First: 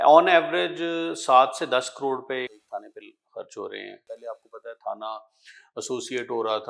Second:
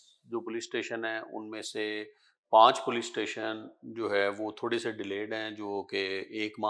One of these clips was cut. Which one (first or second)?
first